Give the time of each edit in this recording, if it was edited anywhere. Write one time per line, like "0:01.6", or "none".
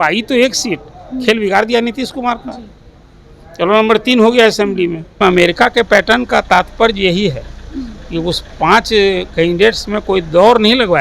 0:05.1